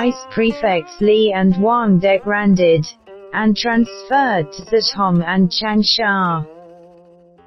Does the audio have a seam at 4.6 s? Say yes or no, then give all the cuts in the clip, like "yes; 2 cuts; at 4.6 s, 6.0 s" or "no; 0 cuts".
no; 1 cut; at 6.4 s